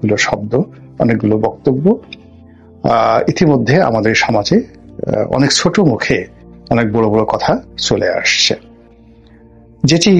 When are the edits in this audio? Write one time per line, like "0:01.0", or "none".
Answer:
none